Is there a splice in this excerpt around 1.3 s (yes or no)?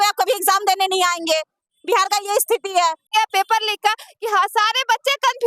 no